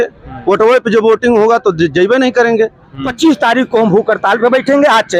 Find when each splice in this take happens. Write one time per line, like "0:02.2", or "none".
0:03.1